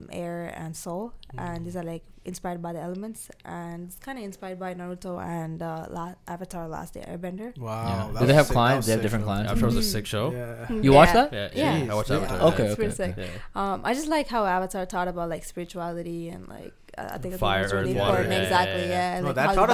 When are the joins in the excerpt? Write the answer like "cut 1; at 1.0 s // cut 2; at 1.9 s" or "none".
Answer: none